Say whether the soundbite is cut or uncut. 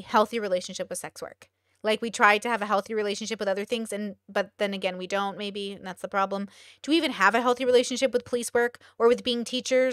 uncut